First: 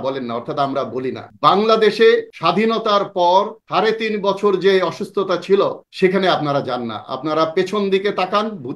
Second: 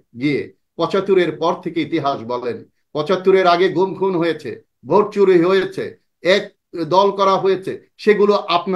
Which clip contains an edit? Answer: first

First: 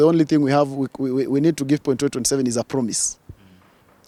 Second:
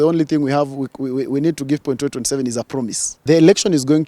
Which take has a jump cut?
second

